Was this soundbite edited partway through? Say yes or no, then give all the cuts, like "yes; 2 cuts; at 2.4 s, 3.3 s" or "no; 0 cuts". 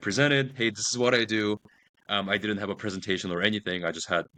no; 0 cuts